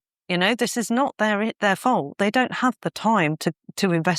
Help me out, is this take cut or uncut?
uncut